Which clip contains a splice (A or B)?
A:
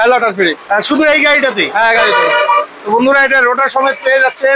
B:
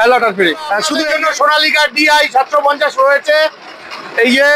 B